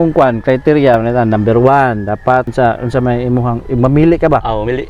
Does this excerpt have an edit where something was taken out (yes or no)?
yes